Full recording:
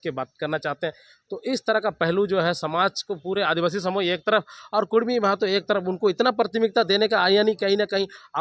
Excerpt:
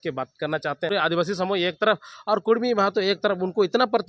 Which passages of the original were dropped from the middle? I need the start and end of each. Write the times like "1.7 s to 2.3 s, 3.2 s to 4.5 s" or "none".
0.9 s to 3.4 s